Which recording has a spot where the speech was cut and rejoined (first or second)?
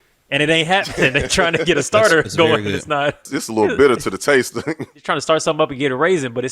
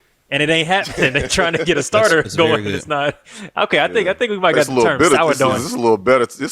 first